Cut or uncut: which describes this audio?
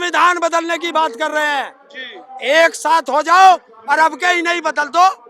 uncut